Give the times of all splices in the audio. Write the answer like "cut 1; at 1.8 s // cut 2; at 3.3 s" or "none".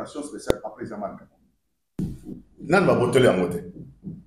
none